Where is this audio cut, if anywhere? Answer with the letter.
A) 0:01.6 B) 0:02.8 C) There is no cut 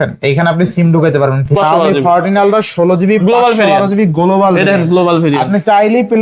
A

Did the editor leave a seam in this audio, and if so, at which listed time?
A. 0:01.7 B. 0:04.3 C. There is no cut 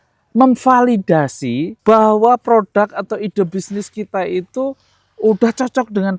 A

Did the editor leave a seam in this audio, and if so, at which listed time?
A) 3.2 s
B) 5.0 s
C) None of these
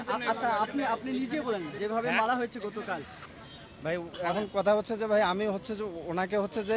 A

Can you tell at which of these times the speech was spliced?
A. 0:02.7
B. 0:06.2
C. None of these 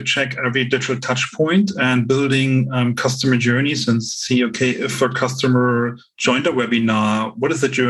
C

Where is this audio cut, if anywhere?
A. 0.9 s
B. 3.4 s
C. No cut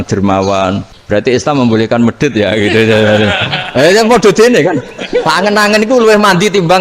A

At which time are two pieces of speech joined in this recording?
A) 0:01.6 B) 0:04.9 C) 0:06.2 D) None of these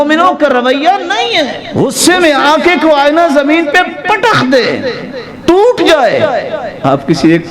A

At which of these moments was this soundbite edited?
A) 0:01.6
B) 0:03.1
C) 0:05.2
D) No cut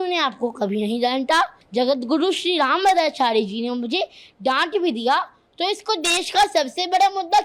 A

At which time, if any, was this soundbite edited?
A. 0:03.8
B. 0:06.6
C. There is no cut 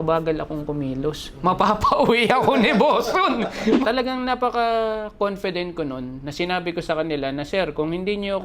A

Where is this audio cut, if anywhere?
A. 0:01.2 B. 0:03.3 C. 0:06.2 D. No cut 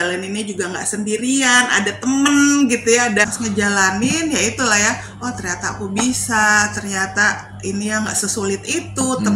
B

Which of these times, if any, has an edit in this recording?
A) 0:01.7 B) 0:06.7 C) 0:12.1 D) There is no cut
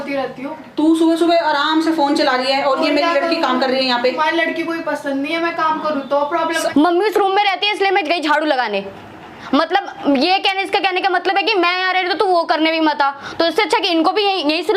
B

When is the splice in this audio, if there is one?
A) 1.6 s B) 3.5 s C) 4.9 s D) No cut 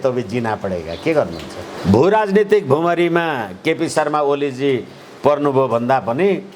A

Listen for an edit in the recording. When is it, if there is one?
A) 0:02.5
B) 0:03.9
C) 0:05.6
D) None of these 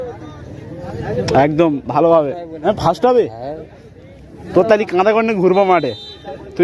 A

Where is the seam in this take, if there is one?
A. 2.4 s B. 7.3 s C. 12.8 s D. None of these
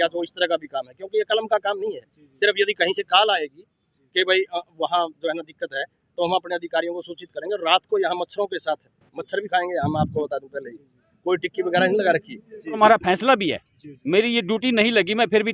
C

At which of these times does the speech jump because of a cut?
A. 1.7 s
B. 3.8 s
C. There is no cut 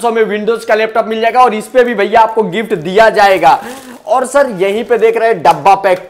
C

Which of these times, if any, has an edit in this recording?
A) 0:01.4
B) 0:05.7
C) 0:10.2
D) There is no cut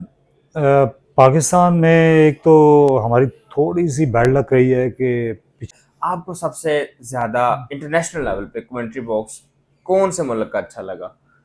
B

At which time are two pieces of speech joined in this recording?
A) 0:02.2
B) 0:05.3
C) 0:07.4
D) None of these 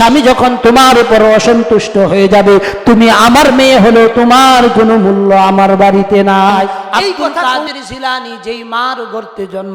C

